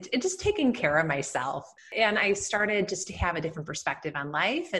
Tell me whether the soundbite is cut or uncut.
cut